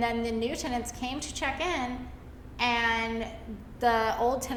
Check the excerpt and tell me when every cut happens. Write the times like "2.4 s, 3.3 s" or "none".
none